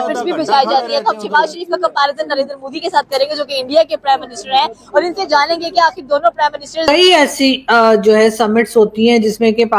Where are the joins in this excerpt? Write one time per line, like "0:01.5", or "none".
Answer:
0:06.9